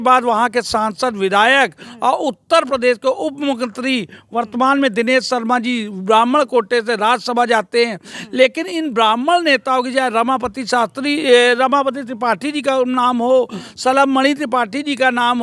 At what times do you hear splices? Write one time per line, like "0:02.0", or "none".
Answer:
none